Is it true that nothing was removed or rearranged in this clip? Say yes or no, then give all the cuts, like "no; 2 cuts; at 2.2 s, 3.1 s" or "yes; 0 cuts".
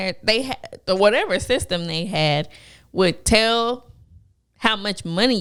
yes; 0 cuts